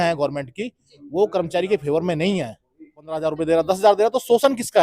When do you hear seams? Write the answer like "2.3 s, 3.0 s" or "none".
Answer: 3.3 s